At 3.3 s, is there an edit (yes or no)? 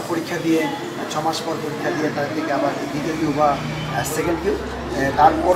no